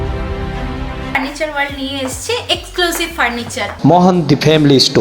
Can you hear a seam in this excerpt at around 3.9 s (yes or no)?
no